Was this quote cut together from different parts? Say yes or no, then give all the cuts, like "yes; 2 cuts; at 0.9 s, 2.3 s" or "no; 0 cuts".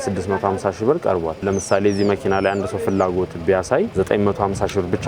no; 0 cuts